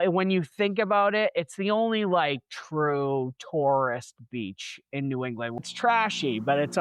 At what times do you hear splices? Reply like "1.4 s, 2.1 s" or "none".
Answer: 5.6 s